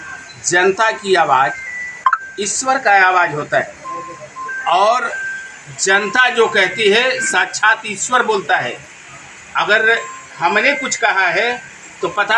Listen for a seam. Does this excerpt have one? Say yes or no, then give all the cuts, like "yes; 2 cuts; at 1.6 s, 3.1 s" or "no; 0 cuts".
no; 0 cuts